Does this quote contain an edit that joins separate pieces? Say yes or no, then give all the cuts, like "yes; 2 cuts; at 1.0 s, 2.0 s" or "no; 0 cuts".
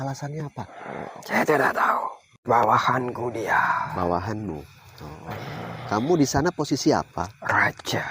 yes; 1 cut; at 2.3 s